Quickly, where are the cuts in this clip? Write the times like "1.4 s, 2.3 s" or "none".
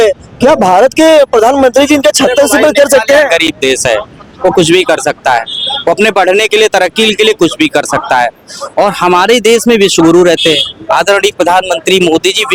none